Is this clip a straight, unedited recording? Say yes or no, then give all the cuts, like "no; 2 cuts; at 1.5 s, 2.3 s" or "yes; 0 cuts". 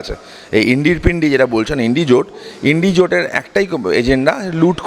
yes; 0 cuts